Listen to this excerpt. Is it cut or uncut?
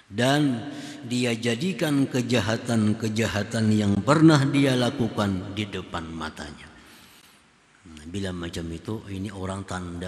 uncut